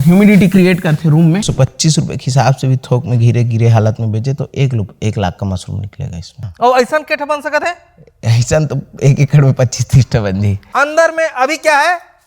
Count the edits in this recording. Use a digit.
3